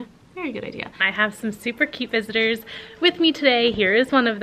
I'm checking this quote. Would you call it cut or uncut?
cut